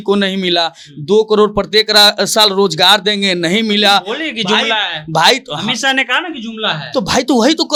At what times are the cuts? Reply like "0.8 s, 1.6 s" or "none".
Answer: none